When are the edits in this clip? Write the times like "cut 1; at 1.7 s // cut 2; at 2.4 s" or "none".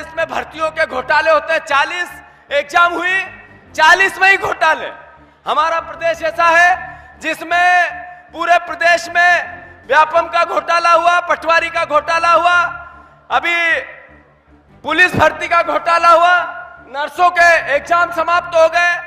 none